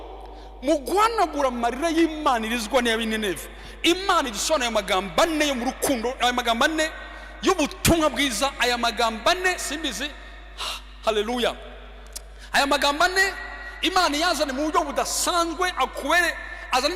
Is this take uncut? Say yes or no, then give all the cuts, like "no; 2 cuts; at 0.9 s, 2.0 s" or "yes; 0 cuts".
yes; 0 cuts